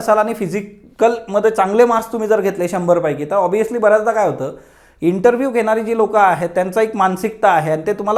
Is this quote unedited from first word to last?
yes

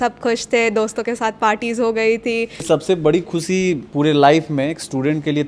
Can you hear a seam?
yes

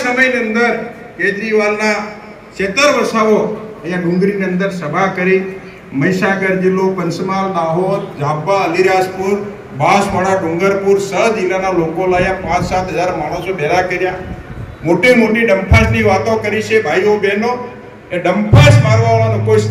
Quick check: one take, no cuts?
yes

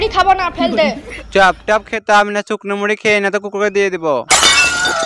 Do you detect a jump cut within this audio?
yes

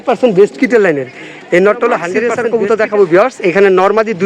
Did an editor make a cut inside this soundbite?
yes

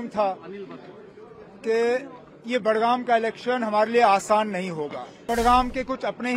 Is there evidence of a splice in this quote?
yes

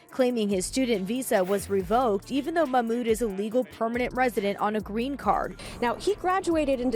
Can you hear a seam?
yes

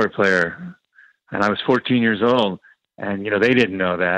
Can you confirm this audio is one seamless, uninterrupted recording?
yes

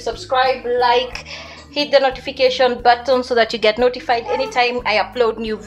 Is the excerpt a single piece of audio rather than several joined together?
yes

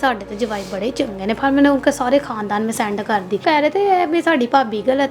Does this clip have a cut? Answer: yes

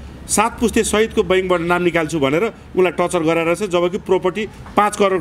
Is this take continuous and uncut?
yes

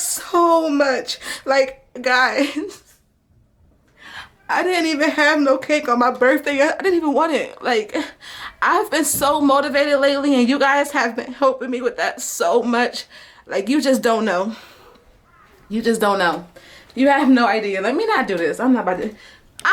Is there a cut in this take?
no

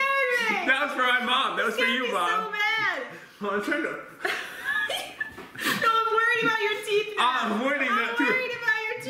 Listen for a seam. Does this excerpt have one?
yes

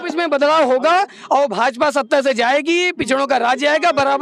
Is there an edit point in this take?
no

